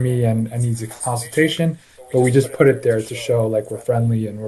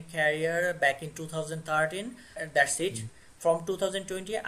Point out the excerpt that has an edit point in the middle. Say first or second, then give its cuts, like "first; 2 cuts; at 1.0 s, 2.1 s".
second; 1 cut; at 2.4 s